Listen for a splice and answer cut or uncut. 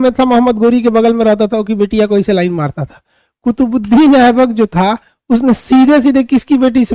uncut